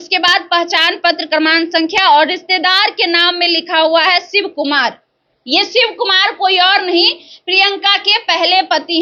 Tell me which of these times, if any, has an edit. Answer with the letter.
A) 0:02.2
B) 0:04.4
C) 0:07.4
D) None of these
D